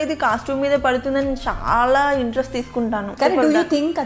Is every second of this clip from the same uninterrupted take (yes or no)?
no